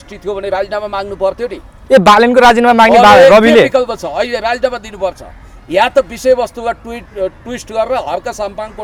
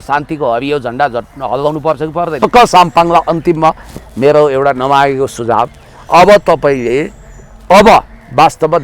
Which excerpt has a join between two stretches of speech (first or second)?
second